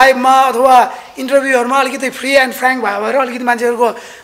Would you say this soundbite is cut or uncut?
uncut